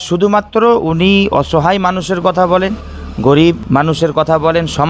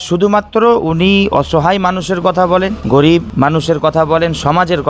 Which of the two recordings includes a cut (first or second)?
second